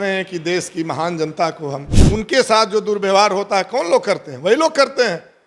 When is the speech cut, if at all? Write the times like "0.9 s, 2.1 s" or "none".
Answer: 1.9 s